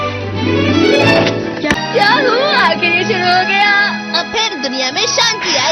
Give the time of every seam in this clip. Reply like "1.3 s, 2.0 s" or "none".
1.7 s